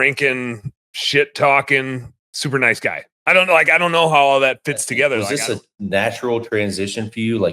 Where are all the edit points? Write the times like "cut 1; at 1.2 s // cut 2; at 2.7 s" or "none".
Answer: cut 1; at 5.3 s